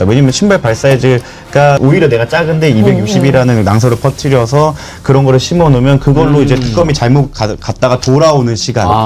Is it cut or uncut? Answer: cut